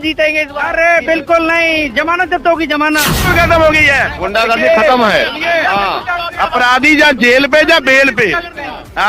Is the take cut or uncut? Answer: cut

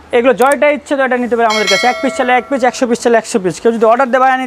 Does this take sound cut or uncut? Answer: uncut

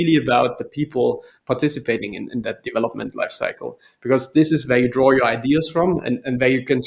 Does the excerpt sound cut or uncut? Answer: uncut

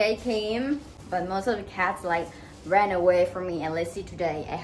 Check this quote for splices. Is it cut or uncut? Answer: cut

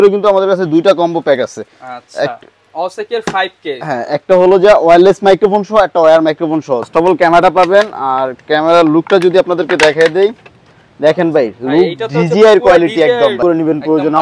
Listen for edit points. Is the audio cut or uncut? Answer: cut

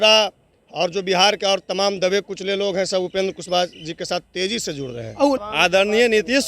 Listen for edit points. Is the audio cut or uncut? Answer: cut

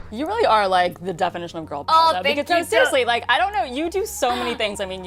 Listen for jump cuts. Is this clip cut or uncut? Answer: uncut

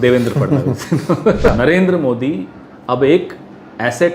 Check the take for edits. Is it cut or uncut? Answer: cut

